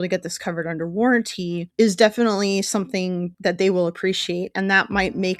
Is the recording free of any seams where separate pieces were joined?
no; 2 cuts; at 1.6 s, 3.3 s

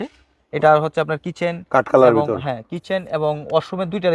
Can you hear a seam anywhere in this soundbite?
no; 0 cuts

